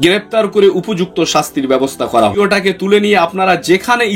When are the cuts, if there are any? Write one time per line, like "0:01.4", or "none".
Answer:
0:02.3